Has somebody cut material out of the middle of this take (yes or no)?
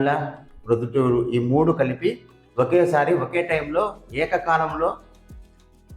no